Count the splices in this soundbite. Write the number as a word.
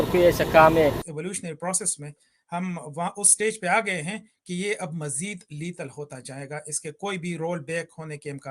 one